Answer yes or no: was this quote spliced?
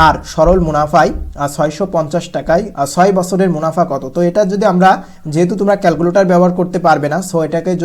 yes